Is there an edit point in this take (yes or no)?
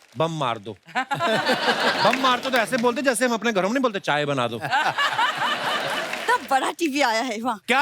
yes